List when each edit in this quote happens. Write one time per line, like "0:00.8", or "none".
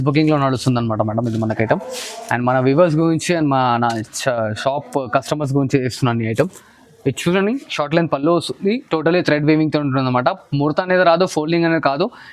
none